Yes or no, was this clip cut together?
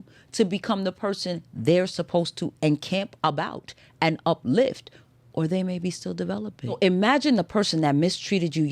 yes